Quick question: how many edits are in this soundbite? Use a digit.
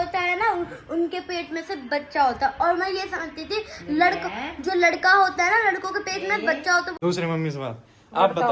1